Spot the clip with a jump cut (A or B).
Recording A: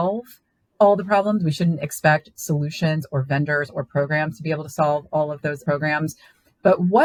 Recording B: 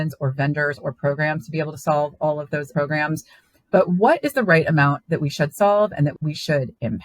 B